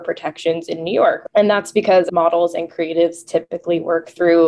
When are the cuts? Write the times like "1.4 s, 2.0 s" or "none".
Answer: 1.2 s, 2.1 s